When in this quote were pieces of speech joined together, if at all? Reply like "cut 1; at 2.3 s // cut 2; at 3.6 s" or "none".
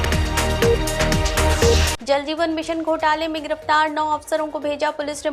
cut 1; at 1.9 s

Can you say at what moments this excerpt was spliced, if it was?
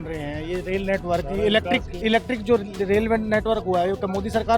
none

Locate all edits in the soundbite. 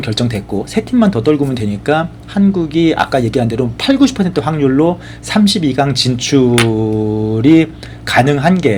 none

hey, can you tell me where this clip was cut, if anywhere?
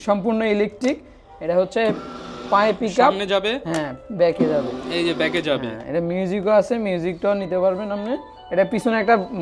none

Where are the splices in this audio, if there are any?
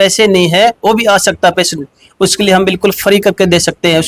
none

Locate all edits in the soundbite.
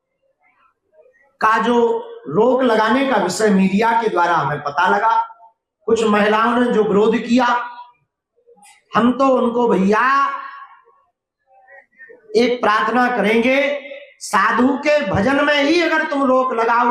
none

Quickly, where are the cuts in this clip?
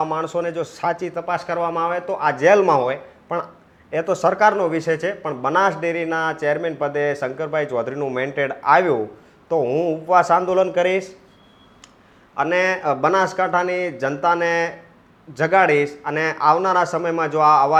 none

